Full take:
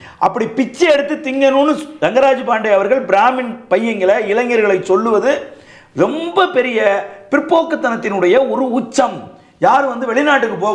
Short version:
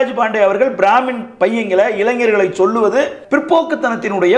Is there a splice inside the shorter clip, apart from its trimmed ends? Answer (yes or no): yes